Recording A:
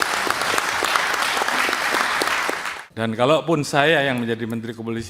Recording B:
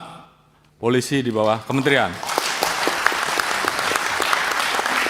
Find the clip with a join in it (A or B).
A